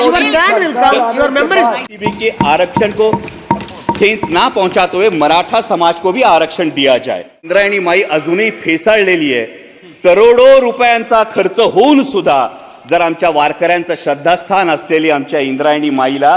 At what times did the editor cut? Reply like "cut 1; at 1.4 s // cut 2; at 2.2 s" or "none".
cut 1; at 2.0 s // cut 2; at 7.5 s